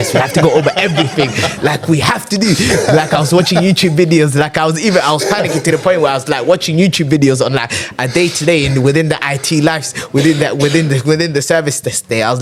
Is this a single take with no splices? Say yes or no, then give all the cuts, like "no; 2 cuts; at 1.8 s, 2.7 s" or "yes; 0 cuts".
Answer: yes; 0 cuts